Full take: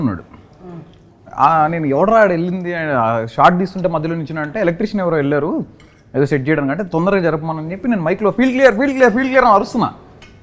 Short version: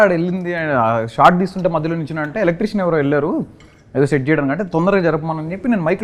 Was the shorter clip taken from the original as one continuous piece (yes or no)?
yes